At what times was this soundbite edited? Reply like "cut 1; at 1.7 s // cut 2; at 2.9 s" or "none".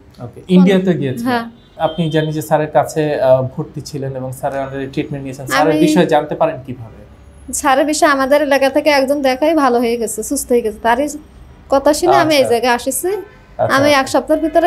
cut 1; at 1.7 s